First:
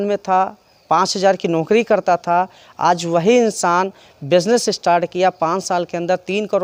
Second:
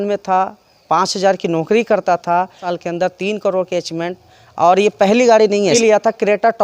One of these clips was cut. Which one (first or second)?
second